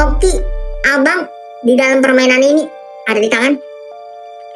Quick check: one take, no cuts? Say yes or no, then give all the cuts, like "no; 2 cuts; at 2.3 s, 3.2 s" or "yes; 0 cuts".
no; 1 cut; at 3.6 s